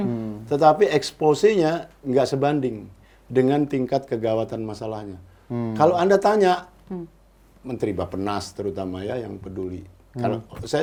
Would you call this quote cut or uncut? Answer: uncut